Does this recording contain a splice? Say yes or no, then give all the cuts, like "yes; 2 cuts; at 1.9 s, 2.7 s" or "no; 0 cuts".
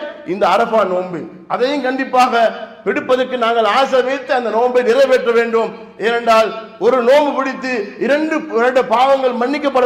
no; 0 cuts